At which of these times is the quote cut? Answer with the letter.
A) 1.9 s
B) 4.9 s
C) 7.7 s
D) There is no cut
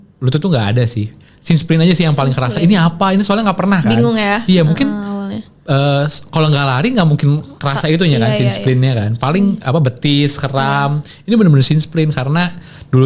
D